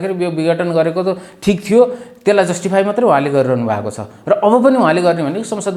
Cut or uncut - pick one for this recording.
uncut